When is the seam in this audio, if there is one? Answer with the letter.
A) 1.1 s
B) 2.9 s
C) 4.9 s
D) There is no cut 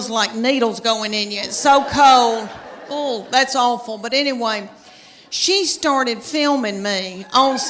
D